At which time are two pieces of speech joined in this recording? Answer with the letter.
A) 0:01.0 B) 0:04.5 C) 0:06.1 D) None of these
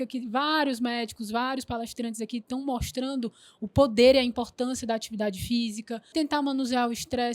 C